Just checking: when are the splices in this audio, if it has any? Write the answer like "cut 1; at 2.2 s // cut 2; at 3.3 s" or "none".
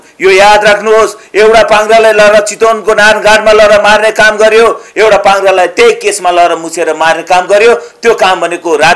none